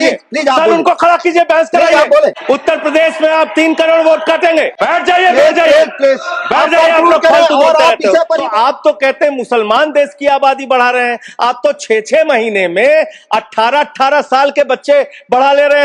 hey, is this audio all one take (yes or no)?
no